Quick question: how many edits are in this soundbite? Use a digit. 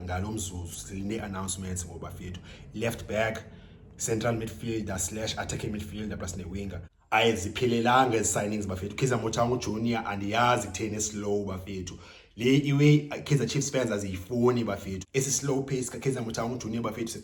0